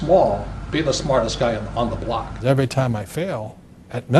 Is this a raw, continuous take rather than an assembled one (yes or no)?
no